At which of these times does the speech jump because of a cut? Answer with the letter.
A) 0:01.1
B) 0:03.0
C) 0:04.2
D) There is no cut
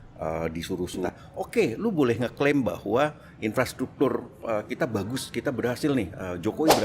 A